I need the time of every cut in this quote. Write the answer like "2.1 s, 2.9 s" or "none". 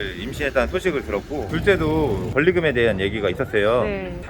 1.4 s, 2.3 s